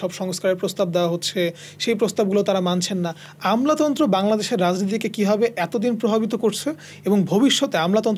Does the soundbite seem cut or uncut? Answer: uncut